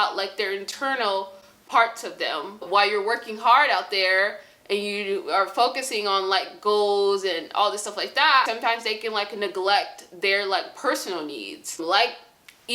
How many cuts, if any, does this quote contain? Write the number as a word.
three